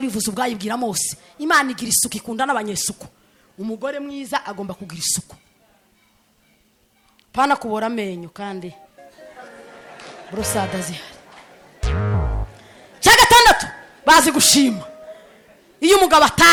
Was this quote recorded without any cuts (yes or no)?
yes